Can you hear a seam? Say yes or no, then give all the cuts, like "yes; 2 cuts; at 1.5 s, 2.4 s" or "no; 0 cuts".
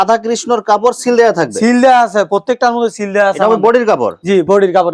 no; 0 cuts